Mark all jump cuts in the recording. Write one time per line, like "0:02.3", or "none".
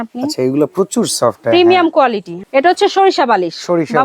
0:02.3